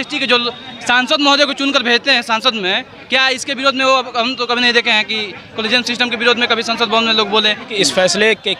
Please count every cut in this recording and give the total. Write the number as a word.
one